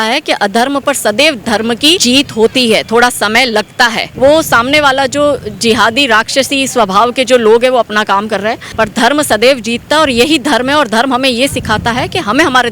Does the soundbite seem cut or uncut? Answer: cut